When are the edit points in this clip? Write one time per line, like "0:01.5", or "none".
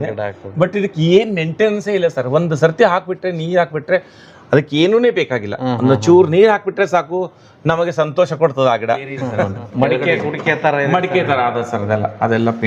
0:09.6